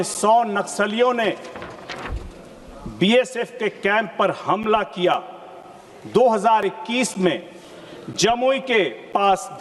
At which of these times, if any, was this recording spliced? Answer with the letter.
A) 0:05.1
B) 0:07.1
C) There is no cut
C